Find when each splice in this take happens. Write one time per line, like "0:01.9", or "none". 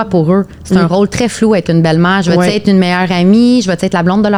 none

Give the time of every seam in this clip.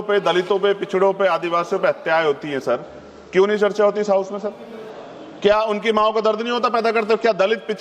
none

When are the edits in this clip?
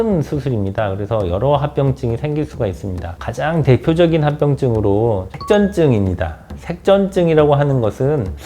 0:05.3

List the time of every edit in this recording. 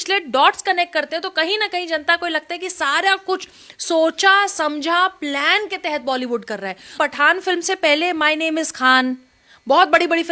0:06.9

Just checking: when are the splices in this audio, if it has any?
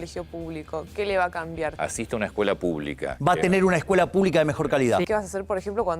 0:01.7
0:03.1
0:05.1

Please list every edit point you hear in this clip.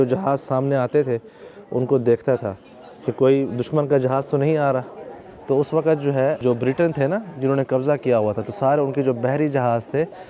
none

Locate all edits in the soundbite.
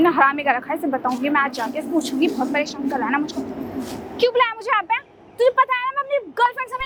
none

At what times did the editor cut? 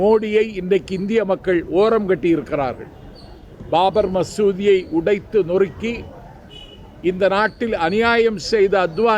none

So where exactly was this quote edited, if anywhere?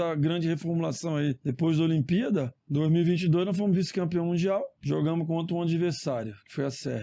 0:01.4
0:02.6
0:04.8

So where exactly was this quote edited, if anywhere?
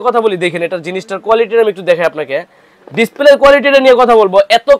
none

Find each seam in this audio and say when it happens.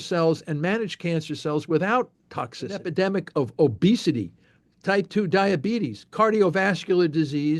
0:02.9

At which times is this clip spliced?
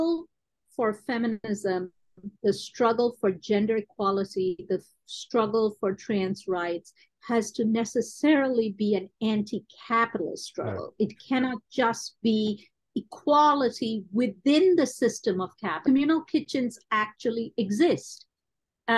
0:15.8

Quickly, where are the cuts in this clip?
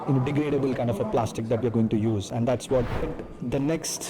0:03.1

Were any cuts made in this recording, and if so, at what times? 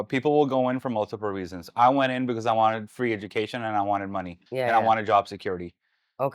0:04.4

